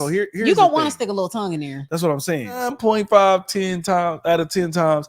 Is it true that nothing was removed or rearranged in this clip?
no; 1 cut; at 2.6 s

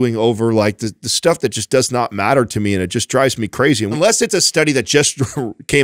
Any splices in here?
yes; 1 cut; at 3.9 s

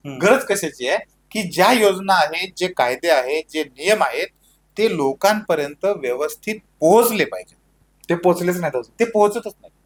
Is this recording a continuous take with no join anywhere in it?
yes; 0 cuts

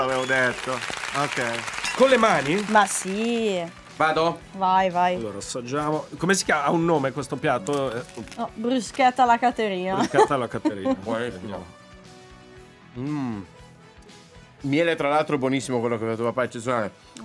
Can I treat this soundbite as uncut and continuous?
yes; 0 cuts

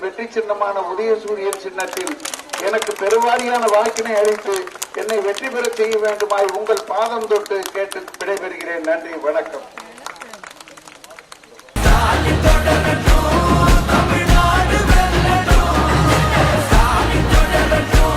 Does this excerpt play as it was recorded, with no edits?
yes; 0 cuts

